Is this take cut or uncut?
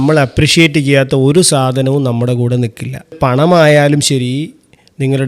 cut